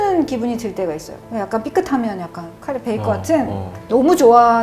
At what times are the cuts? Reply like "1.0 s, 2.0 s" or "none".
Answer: 1.2 s, 3.7 s